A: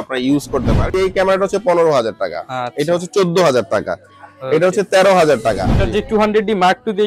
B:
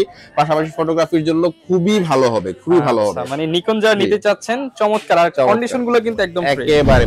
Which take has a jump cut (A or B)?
A